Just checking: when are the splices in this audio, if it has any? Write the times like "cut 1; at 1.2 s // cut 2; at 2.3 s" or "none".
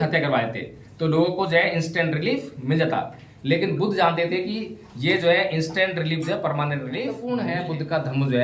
cut 1; at 7.2 s

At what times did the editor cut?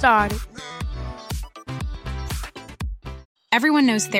cut 1; at 3.2 s

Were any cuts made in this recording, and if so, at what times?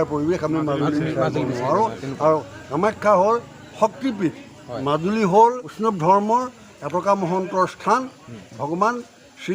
cut 1; at 4.7 s // cut 2; at 5.7 s

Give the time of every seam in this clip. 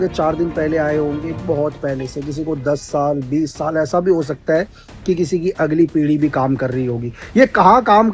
none

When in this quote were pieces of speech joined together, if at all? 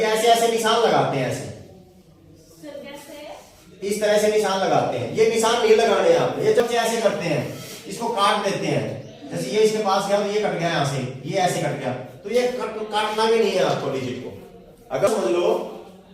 cut 1; at 6.6 s // cut 2; at 15.1 s

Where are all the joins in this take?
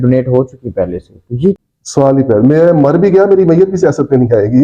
cut 1; at 1.6 s

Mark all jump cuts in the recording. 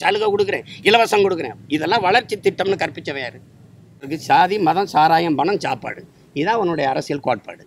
cut 1; at 4.1 s

